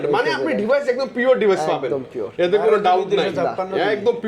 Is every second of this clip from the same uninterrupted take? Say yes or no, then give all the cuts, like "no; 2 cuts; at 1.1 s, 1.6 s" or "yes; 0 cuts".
yes; 0 cuts